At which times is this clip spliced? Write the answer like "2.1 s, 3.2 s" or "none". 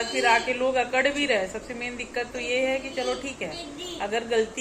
none